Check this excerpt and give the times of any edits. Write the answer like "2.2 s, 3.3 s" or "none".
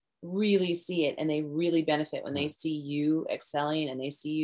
none